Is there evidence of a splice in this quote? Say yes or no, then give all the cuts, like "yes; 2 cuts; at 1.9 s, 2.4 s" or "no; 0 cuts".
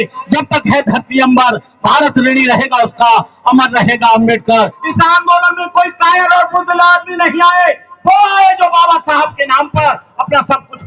yes; 1 cut; at 4.8 s